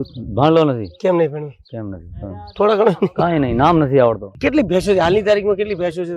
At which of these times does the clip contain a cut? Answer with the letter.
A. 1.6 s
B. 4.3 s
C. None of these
B